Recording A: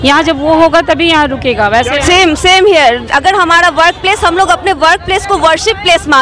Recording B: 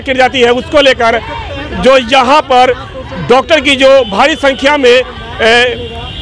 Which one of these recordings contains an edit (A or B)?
A